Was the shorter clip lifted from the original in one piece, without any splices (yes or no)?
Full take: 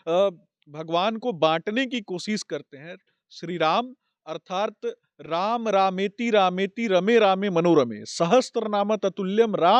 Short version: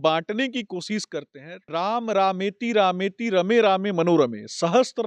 no